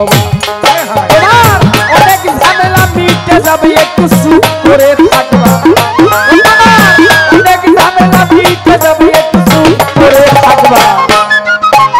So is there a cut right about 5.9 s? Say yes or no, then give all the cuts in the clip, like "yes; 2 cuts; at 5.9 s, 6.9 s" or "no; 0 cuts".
no; 0 cuts